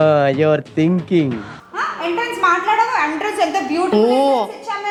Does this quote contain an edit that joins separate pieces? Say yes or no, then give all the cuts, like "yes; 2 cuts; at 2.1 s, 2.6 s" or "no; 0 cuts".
no; 0 cuts